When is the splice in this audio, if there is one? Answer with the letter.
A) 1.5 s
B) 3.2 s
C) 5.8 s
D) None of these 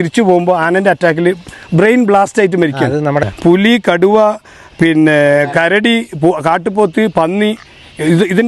B